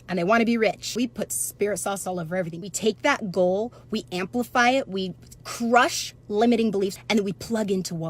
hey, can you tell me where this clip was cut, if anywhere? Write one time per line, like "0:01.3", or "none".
0:00.8
0:02.6
0:07.0